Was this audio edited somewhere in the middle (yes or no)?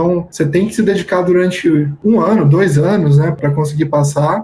yes